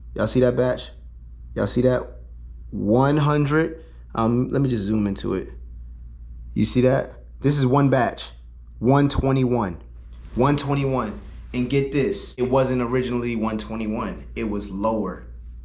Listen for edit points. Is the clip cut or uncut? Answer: uncut